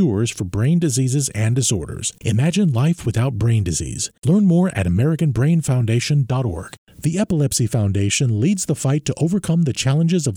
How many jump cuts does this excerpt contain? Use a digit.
1